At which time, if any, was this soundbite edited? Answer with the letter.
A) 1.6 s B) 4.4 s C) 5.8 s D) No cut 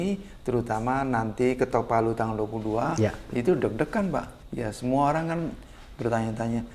B